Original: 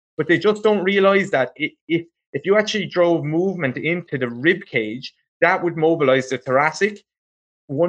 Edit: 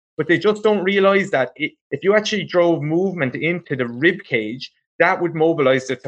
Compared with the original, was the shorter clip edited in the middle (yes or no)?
yes